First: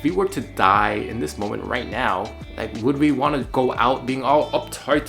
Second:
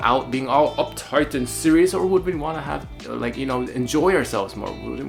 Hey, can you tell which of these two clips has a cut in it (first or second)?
first